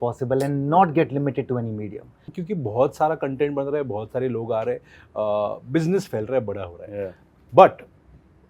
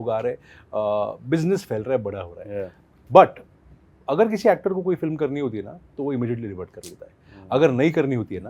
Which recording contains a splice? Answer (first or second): first